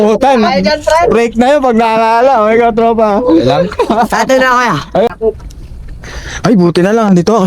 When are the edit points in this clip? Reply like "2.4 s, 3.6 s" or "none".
5.1 s